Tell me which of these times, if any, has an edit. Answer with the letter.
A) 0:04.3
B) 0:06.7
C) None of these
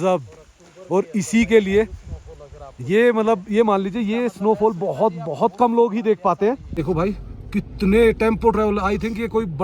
B